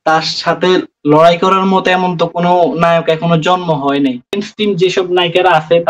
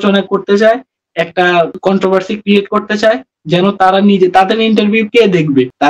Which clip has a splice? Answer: first; 1 cut; at 4.4 s

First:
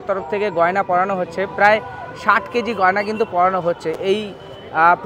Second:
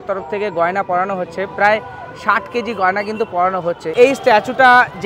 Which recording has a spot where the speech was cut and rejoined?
second; 1 cut; at 3.9 s

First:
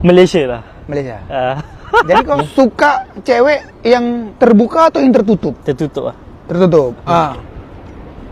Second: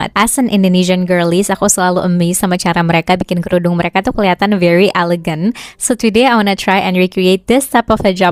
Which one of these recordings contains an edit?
first; 2 cuts; at 2.2 s, 7.0 s

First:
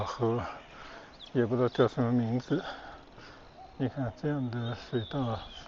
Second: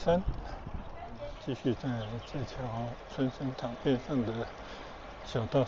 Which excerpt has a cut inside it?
second; 1 cut; at 1.4 s

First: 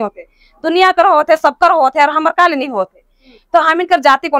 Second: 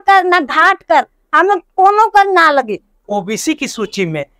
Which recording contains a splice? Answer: second; 1 cut; at 3.0 s

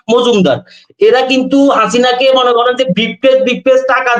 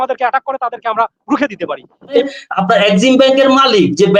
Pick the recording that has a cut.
second; 1 cut; at 2.3 s

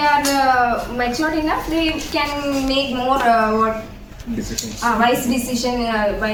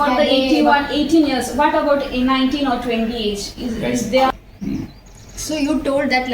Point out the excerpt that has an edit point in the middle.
second; 1 cut; at 4.3 s

